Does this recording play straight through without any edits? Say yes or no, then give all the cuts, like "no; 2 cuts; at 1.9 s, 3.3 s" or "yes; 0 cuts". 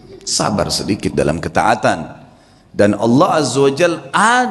yes; 0 cuts